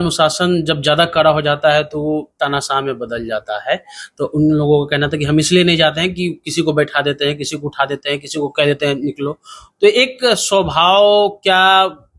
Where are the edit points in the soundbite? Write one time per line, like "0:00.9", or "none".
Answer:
none